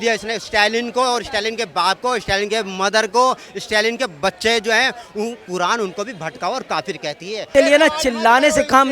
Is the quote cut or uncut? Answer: cut